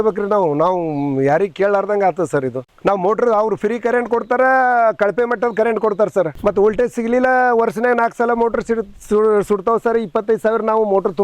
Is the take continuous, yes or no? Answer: no